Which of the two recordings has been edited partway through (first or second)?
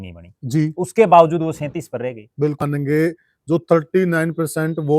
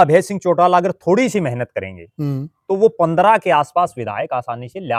first